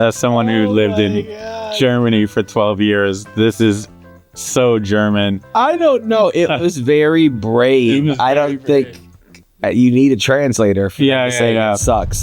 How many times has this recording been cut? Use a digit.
0